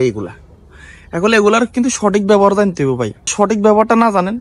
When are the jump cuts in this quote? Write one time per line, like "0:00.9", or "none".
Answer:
0:03.3